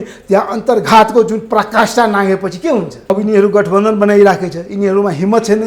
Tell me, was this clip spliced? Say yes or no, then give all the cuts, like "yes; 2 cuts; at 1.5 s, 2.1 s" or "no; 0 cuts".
yes; 1 cut; at 2.9 s